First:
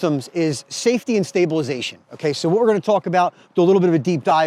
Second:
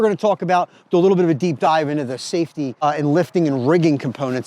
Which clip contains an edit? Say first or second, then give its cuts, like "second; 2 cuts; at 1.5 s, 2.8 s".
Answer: second; 1 cut; at 2.8 s